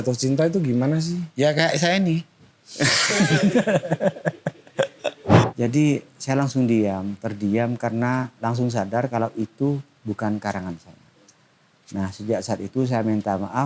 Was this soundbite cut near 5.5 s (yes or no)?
yes